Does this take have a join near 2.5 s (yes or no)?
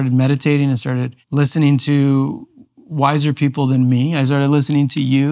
no